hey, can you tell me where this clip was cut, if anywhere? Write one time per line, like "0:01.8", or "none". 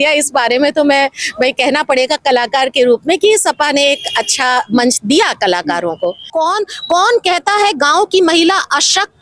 0:06.2